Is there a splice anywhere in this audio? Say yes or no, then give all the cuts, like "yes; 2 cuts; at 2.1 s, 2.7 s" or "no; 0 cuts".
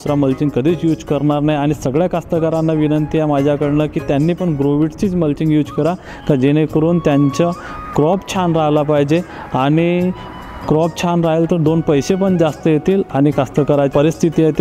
no; 0 cuts